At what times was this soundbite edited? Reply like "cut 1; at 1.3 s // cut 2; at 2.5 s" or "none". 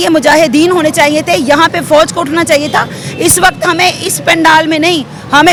none